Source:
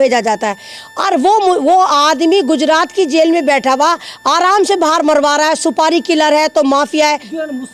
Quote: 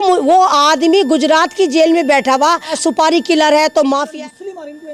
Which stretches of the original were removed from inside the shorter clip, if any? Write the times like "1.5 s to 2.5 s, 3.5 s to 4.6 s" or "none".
4.1 s to 5.5 s